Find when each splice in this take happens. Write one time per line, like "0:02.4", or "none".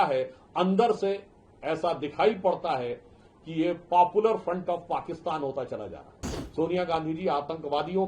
0:06.4